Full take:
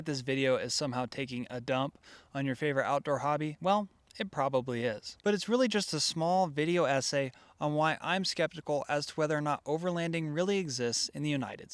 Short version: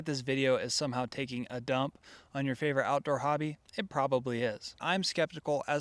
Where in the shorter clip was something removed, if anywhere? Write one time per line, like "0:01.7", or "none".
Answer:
0:03.5
0:04.8